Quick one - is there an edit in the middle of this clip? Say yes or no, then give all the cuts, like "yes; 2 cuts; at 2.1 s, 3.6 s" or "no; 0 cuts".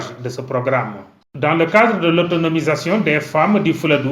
yes; 1 cut; at 1.1 s